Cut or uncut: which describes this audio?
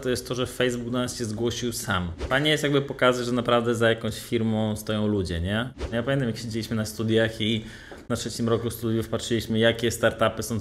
cut